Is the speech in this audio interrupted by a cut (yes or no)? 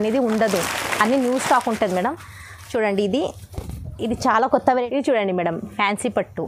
yes